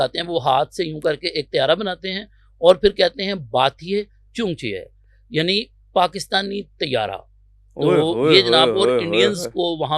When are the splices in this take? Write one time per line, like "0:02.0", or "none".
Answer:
none